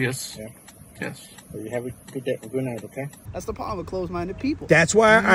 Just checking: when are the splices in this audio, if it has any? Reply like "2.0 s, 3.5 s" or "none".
3.2 s